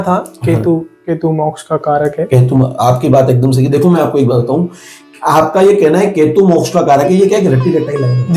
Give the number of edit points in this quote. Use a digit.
0